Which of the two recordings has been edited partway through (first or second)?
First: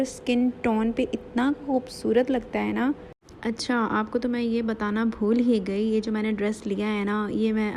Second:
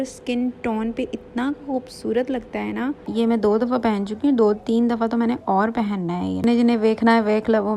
second